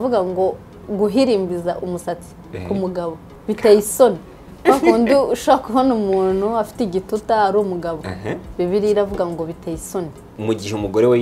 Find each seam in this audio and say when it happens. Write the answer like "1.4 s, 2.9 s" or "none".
3.3 s, 10.3 s